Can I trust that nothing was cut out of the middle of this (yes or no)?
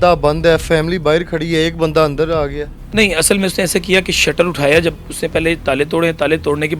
yes